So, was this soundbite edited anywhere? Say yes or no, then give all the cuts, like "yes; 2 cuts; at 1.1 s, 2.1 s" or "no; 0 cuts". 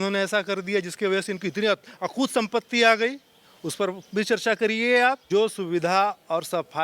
yes; 1 cut; at 5.2 s